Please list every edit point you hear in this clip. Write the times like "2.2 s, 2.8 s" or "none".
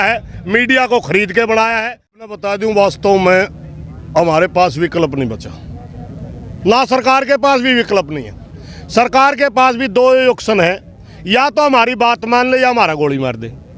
2.3 s